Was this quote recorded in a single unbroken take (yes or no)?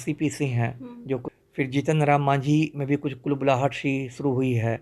no